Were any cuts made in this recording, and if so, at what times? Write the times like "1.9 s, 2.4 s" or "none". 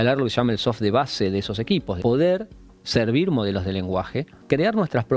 2.0 s, 4.4 s